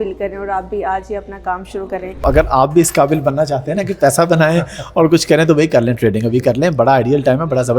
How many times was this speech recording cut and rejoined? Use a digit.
1